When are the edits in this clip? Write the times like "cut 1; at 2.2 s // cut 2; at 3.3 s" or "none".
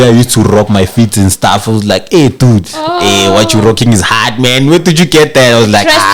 none